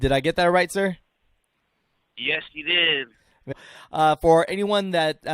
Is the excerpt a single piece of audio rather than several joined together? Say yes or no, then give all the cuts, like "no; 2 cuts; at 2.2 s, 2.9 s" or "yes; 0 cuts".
no; 1 cut; at 3.5 s